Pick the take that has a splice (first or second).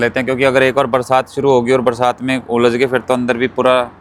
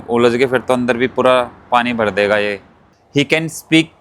second